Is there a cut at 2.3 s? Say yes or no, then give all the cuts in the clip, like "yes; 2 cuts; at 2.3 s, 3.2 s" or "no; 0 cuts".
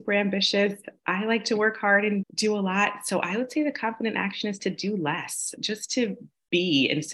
yes; 2 cuts; at 2.3 s, 5.6 s